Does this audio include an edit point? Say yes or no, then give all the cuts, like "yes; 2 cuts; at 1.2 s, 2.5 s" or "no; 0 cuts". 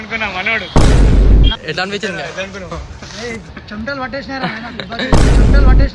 yes; 1 cut; at 1.6 s